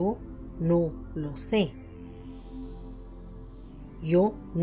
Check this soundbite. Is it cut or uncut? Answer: uncut